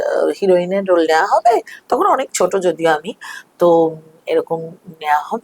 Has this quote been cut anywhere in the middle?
no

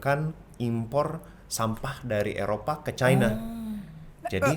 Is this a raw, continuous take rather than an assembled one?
yes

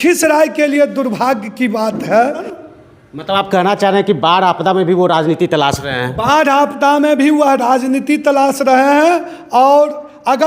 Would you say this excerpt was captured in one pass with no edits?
no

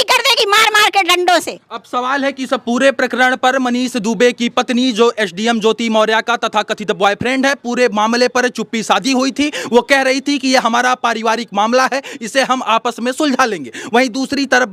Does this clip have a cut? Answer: no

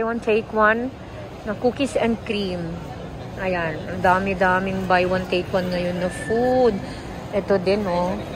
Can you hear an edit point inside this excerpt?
no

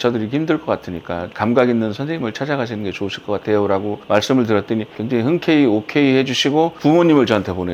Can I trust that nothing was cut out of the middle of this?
yes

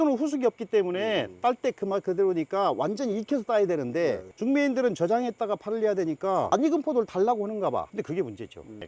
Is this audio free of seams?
yes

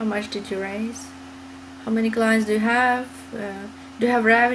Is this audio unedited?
yes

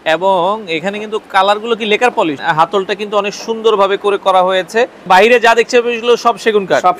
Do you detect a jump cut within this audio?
yes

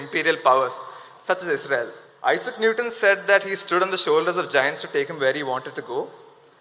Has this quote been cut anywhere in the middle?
yes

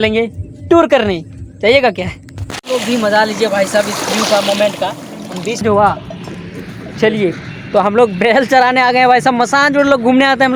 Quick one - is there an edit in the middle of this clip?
yes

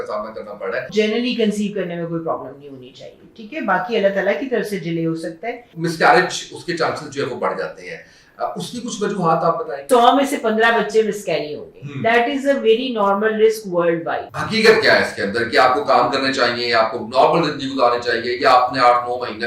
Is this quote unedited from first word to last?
no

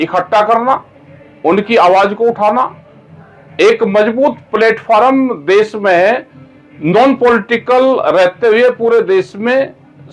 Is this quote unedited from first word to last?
yes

